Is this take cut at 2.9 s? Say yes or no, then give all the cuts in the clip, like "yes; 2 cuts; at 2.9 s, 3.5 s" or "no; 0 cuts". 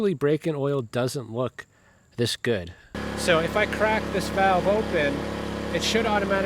yes; 1 cut; at 2.9 s